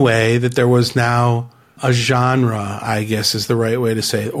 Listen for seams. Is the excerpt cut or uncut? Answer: cut